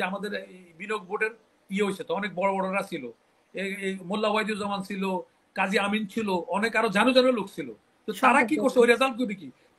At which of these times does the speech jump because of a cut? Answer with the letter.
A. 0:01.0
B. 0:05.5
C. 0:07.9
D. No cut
D